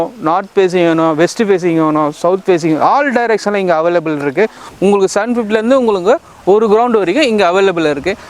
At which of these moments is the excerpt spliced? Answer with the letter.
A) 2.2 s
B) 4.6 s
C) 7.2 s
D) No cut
B